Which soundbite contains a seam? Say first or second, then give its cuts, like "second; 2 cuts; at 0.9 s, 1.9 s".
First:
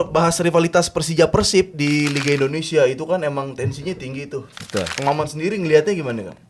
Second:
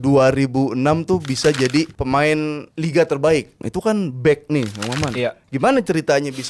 second; 2 cuts; at 2.2 s, 3.6 s